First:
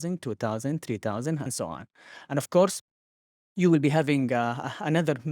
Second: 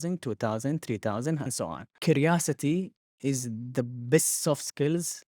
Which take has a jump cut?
second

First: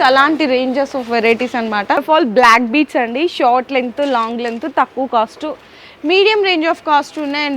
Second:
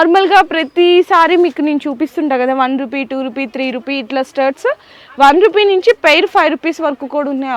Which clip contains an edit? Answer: first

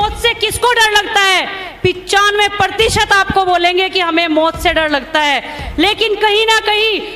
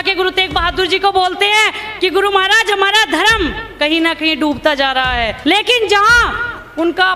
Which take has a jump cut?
second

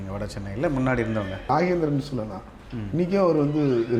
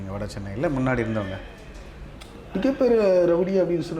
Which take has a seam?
first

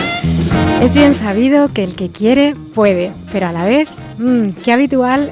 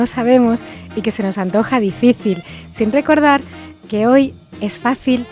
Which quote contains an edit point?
second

